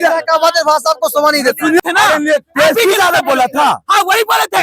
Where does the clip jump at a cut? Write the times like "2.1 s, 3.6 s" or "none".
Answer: 1.8 s